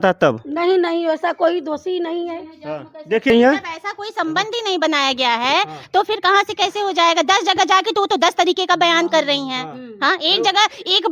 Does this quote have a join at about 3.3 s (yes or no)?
yes